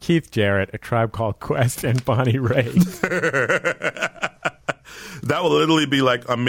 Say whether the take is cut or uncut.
uncut